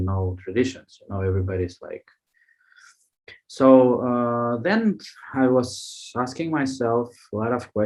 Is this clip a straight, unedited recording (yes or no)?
yes